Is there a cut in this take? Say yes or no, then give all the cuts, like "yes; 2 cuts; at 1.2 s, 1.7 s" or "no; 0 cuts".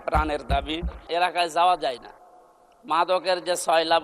yes; 1 cut; at 1.0 s